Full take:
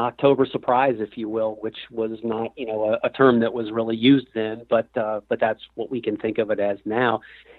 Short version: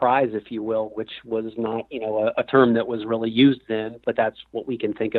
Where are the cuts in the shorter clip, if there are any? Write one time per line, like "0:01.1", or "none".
0:04.0